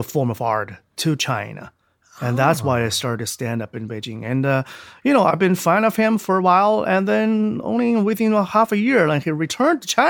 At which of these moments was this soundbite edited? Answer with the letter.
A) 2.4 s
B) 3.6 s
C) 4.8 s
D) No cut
D